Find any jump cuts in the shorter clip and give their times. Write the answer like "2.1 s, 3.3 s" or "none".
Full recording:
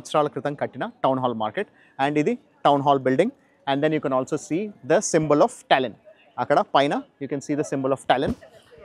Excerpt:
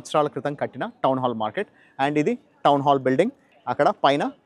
3.5 s